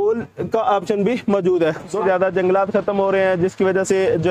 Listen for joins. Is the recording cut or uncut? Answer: cut